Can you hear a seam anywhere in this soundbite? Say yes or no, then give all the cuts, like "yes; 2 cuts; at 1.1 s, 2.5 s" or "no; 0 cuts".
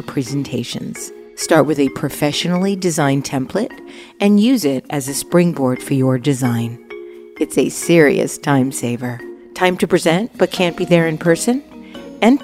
no; 0 cuts